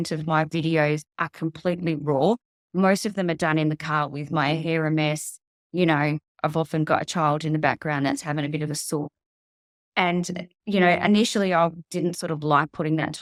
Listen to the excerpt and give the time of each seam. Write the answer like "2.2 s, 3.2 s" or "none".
none